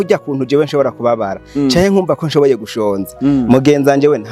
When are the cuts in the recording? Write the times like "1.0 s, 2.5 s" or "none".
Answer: none